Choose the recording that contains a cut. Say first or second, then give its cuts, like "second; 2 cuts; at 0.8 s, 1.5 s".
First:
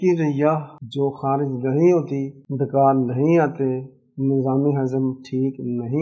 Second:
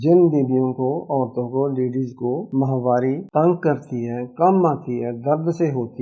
second; 2 cuts; at 2.5 s, 3.2 s